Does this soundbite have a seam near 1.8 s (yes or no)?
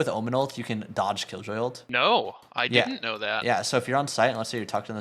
yes